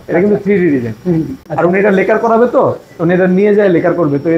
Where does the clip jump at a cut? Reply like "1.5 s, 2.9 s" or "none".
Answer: 1.4 s